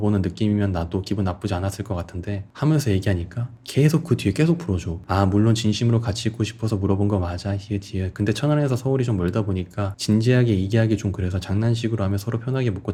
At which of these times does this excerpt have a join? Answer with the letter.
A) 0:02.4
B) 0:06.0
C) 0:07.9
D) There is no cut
D